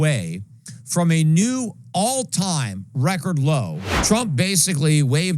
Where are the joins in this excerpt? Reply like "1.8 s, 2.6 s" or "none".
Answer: 3.9 s